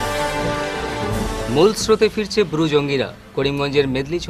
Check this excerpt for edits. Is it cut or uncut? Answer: cut